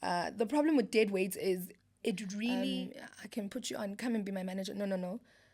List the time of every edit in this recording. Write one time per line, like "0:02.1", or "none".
0:02.8